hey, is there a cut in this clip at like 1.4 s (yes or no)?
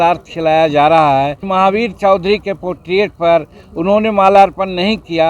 yes